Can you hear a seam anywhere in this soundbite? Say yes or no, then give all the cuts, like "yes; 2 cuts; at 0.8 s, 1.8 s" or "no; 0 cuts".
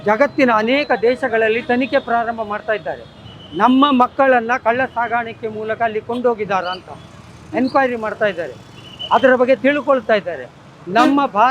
no; 0 cuts